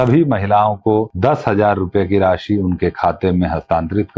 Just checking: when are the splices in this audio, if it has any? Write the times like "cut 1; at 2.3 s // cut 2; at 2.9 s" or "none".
cut 1; at 1.1 s